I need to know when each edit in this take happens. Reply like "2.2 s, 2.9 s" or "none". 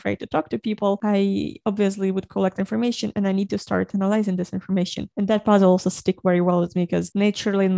none